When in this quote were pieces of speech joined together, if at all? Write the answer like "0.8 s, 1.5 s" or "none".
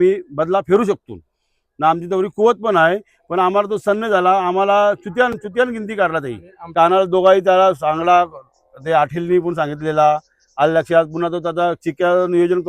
6.7 s